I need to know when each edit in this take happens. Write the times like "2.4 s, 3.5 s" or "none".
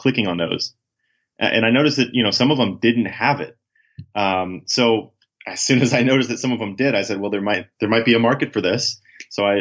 7.7 s